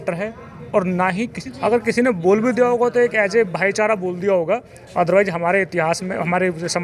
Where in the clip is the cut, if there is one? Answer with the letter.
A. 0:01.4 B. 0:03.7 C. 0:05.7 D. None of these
A